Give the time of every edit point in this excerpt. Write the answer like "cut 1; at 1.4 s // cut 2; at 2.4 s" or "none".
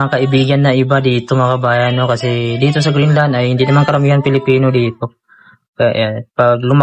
none